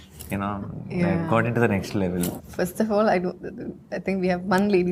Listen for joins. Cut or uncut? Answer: cut